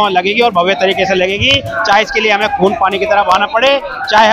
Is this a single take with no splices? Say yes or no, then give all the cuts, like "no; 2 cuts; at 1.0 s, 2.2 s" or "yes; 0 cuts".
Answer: yes; 0 cuts